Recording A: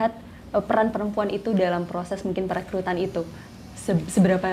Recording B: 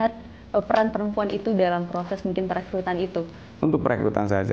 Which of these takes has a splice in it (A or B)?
B